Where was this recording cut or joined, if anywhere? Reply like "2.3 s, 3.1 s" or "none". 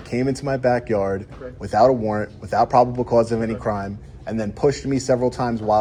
none

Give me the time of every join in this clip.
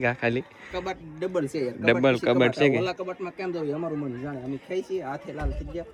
none

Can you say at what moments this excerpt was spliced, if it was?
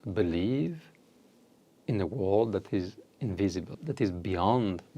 3.7 s

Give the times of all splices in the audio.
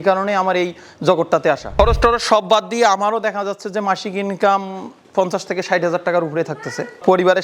1.7 s

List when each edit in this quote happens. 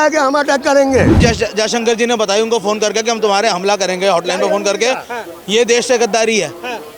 1.2 s

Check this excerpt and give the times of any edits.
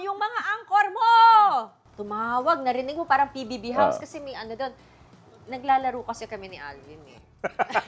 none

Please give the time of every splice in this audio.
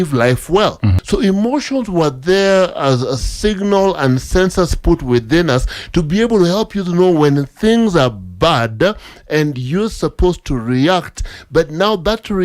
0.9 s

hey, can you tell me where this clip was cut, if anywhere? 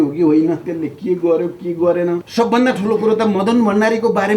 2.3 s

